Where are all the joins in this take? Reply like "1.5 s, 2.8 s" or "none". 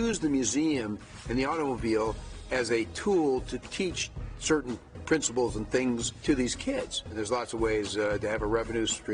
none